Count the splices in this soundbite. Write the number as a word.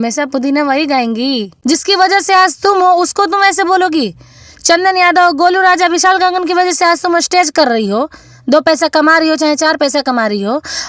one